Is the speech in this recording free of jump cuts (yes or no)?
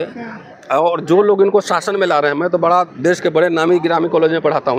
yes